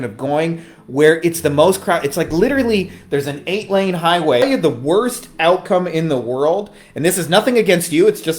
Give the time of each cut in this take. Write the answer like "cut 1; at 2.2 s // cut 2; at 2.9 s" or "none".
cut 1; at 4.4 s